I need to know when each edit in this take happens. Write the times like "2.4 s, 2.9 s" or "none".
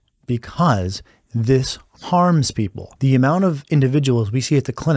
2.8 s